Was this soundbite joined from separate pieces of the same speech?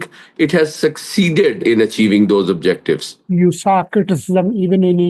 yes; 1 cut; at 3.2 s

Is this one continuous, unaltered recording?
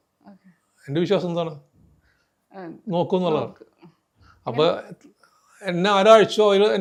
yes; 0 cuts

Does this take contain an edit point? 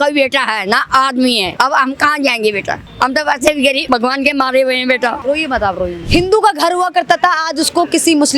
yes; 5 cuts; at 1.5 s, 2.9 s, 3.8 s, 5.2 s, 6.0 s

